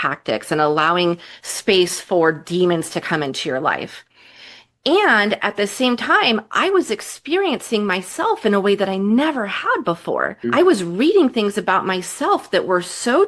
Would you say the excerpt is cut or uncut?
cut